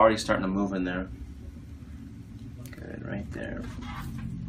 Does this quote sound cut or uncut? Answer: uncut